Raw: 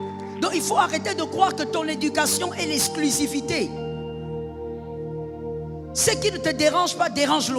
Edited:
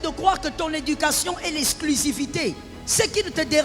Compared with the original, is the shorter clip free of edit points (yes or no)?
no